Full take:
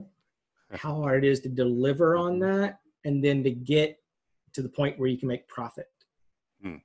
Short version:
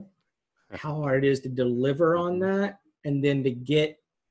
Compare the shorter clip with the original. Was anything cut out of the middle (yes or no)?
no